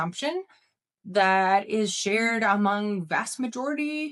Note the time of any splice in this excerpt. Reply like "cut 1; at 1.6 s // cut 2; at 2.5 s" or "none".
none

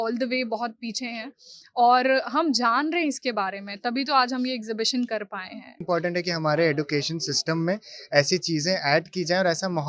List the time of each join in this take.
cut 1; at 5.8 s

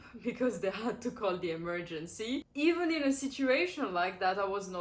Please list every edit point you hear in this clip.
cut 1; at 2.5 s

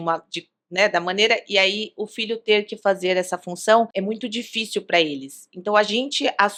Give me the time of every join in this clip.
none

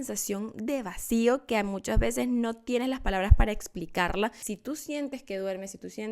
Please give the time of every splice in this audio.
cut 1; at 4.5 s

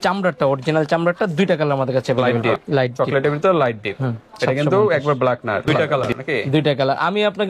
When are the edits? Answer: cut 1; at 2.5 s // cut 2; at 5.7 s

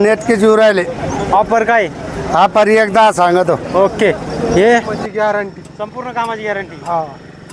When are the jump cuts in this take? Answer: cut 1; at 5.0 s

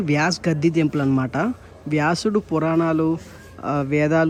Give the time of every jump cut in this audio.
none

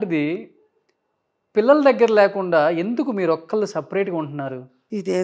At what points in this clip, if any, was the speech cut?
none

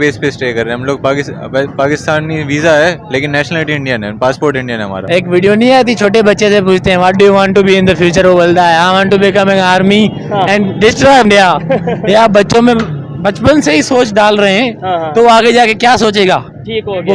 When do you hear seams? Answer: cut 1; at 5.0 s // cut 2; at 11.2 s

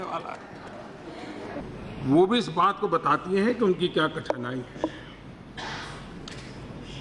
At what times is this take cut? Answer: cut 1; at 1.6 s

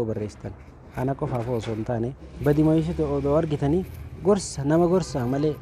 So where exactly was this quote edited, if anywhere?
cut 1; at 2.2 s

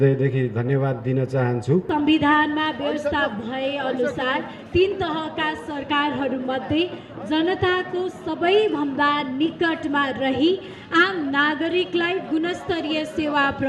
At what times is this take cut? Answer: cut 1; at 1.9 s

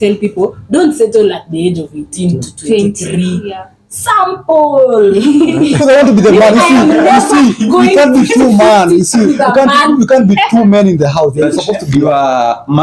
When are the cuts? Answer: cut 1; at 5.8 s // cut 2; at 11.8 s

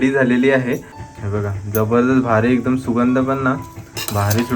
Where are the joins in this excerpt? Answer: cut 1; at 0.9 s

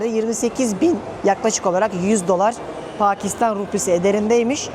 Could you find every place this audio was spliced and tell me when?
none

